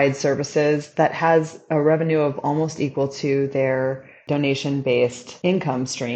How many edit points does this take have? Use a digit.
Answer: 2